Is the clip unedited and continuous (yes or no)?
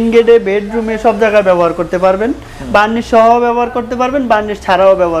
yes